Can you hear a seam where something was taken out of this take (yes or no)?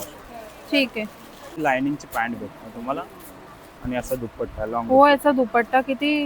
yes